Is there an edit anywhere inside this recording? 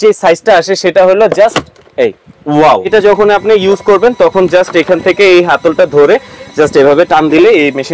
yes; 1 cut; at 2.9 s

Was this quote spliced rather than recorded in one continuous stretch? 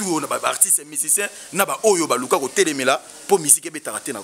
no; 0 cuts

